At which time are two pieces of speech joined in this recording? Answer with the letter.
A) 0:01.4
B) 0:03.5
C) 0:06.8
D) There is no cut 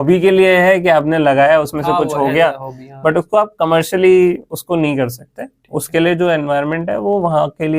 D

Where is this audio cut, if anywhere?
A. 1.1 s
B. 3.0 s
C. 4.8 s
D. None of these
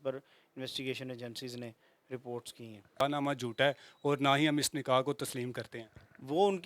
B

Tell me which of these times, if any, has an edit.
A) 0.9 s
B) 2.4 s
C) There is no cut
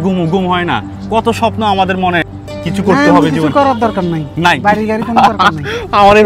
B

